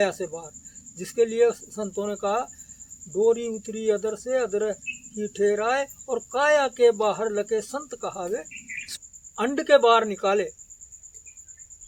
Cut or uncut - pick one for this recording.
cut